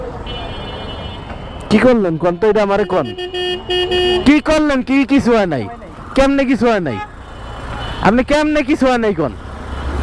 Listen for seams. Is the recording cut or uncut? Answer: uncut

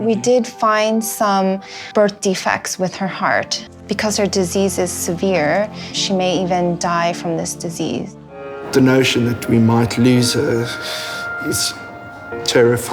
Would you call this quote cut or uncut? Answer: cut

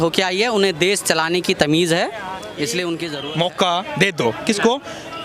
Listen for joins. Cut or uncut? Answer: cut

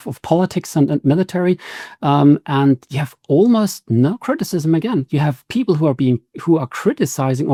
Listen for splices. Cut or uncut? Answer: uncut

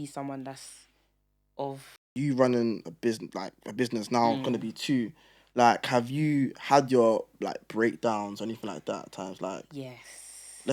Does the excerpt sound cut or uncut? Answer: cut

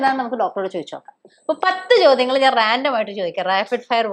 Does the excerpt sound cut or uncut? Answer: cut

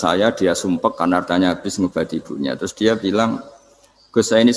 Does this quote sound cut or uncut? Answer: uncut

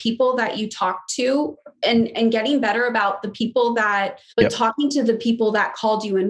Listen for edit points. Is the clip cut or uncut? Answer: cut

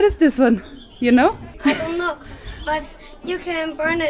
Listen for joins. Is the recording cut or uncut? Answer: cut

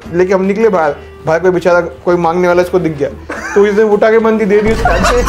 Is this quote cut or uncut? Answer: uncut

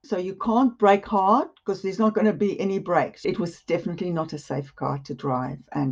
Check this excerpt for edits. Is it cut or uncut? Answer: cut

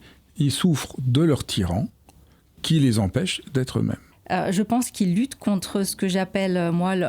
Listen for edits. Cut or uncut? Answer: cut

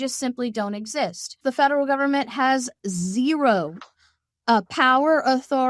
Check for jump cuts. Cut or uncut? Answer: cut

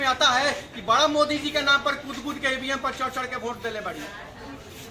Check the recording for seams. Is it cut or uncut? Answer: uncut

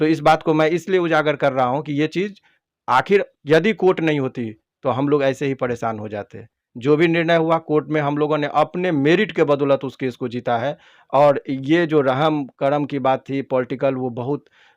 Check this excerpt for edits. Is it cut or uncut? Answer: uncut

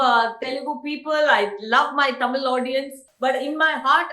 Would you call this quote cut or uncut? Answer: cut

